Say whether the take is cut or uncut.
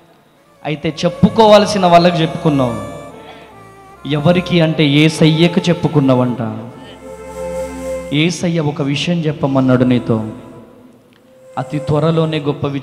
uncut